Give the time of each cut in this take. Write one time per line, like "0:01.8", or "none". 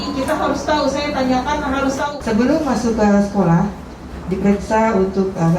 0:02.2